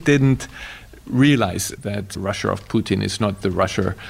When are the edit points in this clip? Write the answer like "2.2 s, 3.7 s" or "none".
1.7 s

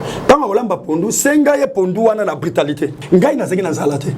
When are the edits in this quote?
3.0 s

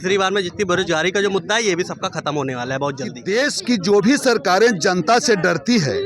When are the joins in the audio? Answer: 3.6 s

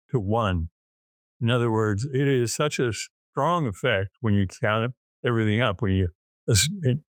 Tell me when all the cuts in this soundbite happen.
none

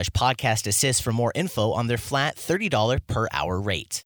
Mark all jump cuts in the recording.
none

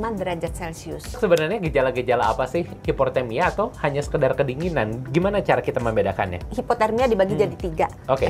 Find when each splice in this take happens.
1.2 s, 2.7 s, 6.5 s

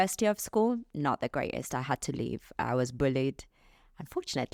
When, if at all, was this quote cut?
none

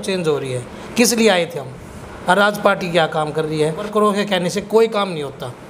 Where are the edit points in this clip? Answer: 3.9 s

